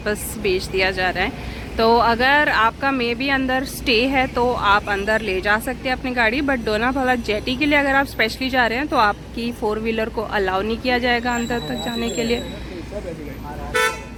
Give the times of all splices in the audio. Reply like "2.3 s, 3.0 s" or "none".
none